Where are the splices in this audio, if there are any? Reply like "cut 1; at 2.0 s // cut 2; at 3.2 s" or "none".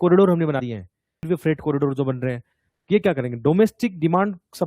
cut 1; at 1.2 s